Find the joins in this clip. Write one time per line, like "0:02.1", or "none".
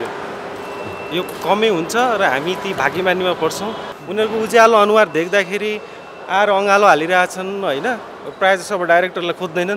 0:03.9

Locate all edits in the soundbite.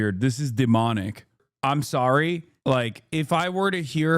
0:01.4
0:02.5

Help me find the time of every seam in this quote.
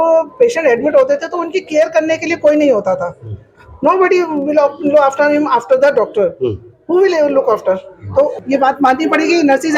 0:08.3

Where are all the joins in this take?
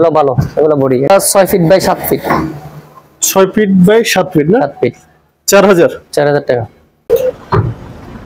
0:01.1
0:06.9

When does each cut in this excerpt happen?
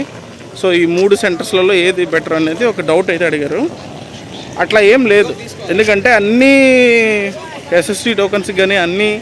none

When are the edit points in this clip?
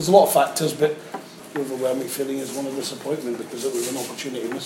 0:01.4

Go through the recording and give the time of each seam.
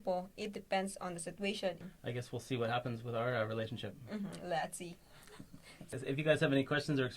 0:01.8
0:05.9

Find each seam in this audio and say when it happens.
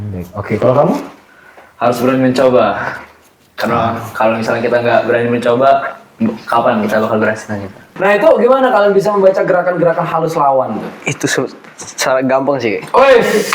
0:07.8

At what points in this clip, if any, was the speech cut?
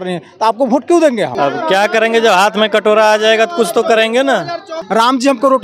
0:01.3
0:04.8

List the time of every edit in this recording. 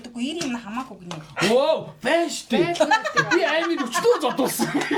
none

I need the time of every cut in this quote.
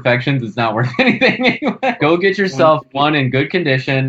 0:02.0

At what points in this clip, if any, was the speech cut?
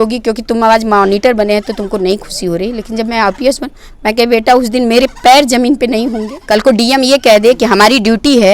0:06.3

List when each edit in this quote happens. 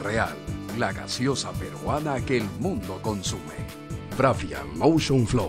0:03.5

